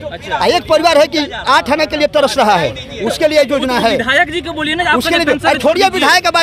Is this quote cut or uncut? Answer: uncut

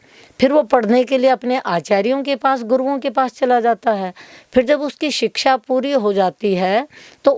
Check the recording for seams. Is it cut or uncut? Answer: uncut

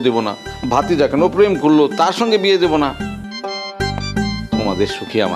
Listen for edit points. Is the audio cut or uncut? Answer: cut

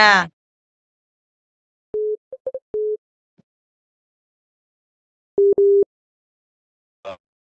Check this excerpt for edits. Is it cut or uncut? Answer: uncut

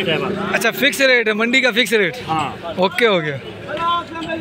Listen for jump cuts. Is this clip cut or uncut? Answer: uncut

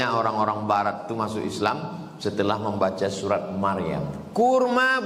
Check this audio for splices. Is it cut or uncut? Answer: cut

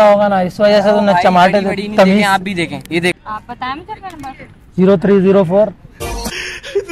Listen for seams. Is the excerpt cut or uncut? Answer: cut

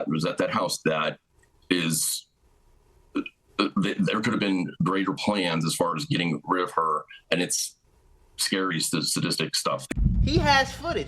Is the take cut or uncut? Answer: cut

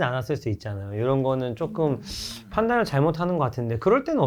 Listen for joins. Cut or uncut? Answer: uncut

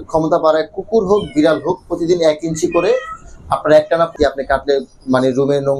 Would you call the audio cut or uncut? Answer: cut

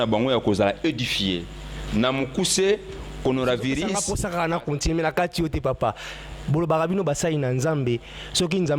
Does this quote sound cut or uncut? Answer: cut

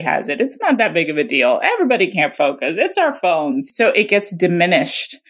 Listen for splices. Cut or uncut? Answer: cut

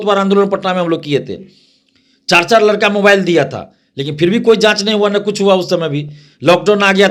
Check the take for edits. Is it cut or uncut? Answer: uncut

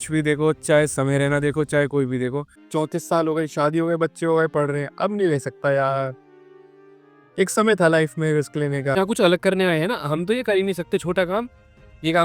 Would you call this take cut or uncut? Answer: cut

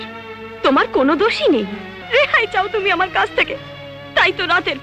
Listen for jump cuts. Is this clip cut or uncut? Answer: cut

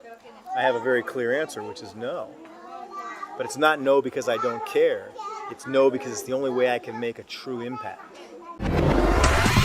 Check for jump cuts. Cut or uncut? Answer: cut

